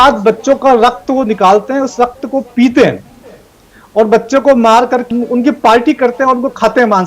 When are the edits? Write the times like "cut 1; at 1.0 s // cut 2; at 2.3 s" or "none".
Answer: cut 1; at 5.1 s

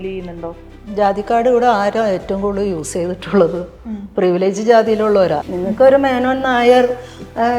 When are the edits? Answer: cut 1; at 5.4 s

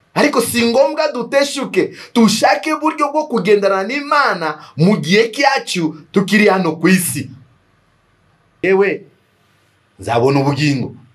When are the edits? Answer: cut 1; at 8.6 s

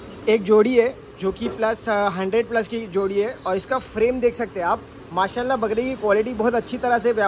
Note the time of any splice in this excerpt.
none

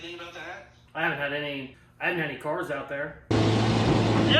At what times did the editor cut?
cut 1; at 1.8 s

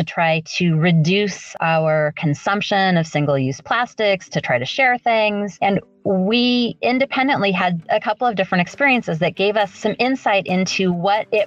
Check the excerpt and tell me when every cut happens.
cut 1; at 7.8 s // cut 2; at 9.7 s

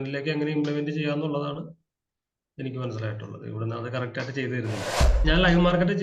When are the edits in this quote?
cut 1; at 5.0 s

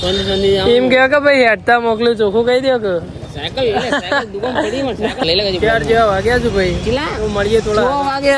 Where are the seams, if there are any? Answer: cut 1; at 5.2 s

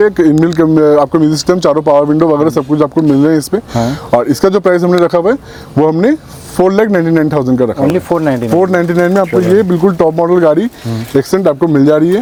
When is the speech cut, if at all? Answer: none

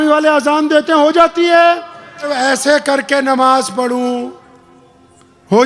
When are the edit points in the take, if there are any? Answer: cut 1; at 2.3 s

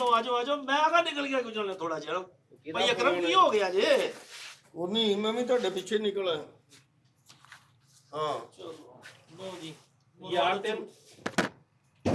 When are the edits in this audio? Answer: none

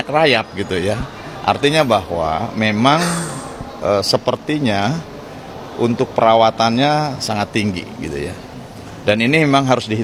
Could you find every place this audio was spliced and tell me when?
none

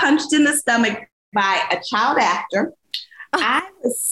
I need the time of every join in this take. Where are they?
none

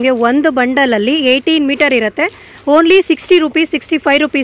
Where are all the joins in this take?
none

